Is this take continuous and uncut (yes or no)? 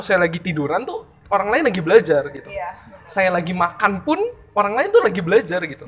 yes